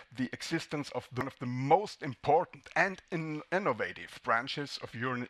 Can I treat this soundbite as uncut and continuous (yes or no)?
no